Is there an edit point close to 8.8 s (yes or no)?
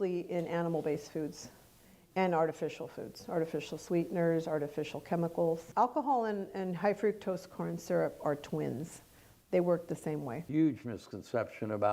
no